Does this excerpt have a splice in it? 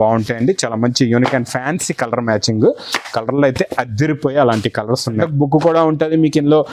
yes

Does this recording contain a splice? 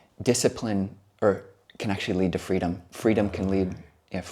no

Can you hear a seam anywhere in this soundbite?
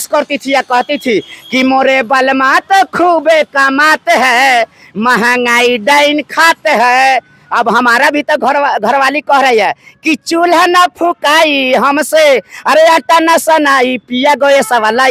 no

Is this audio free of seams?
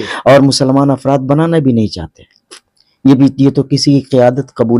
yes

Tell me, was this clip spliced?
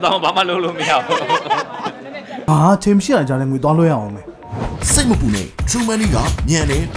yes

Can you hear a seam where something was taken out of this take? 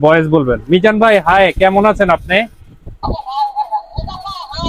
no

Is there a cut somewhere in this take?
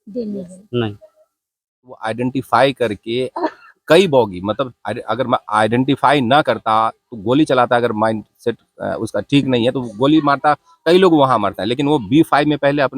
yes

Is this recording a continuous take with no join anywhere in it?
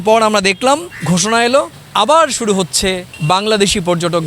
yes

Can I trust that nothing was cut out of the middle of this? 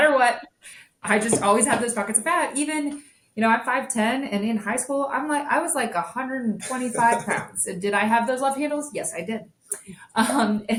yes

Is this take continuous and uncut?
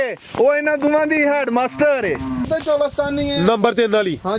no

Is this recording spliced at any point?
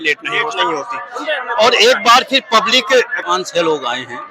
yes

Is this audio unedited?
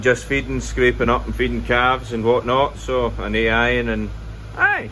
yes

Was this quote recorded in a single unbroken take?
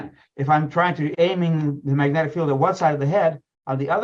no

